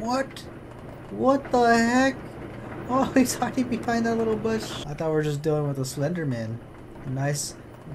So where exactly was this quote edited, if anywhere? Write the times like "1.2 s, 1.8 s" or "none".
4.8 s